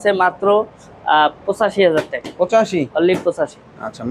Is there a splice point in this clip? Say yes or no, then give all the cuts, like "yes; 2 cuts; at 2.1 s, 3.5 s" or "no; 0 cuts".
no; 0 cuts